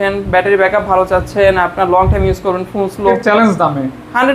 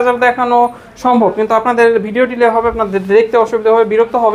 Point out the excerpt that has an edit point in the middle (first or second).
first